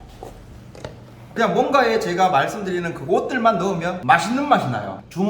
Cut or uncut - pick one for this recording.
cut